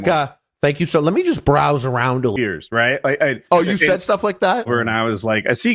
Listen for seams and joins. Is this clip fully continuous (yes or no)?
no